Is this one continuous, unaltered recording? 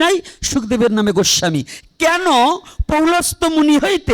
yes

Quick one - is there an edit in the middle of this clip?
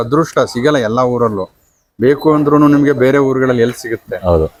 no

